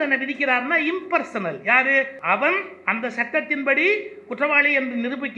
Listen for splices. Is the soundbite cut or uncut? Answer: cut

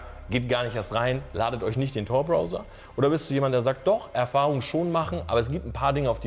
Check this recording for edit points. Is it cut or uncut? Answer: uncut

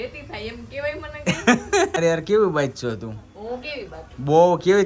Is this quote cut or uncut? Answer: cut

